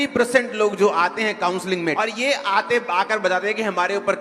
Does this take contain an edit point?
yes; 1 cut; at 1.9 s

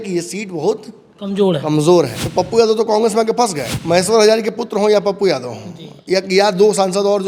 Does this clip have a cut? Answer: yes; 2 cuts; at 2.2 s, 3.7 s

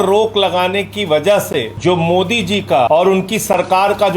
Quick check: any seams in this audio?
yes; 2 cuts; at 1.7 s, 2.9 s

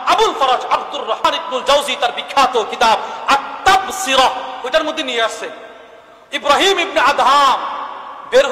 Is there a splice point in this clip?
yes; 1 cut; at 1.3 s

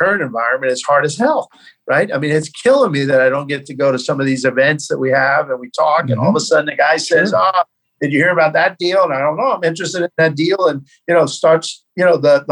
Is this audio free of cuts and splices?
yes; 0 cuts

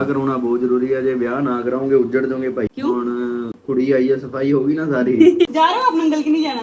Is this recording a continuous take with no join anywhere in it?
yes; 0 cuts

